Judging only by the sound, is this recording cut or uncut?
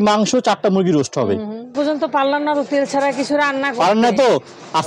cut